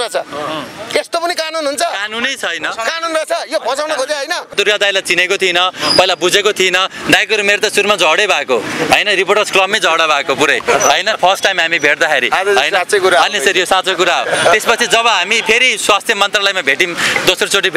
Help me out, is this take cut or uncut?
cut